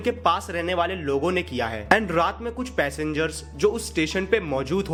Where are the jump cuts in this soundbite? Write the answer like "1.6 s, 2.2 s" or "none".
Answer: none

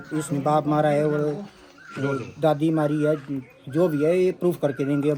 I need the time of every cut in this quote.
none

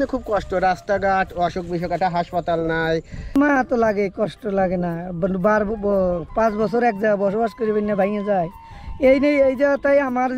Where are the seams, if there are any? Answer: 3.1 s

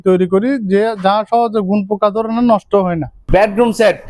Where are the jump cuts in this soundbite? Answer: 3.1 s

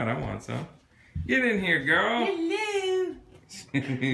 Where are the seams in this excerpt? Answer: 1.6 s

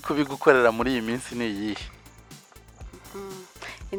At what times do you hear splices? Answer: none

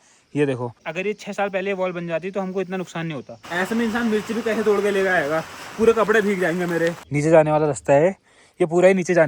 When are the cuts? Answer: 0.8 s, 3.4 s, 7.0 s

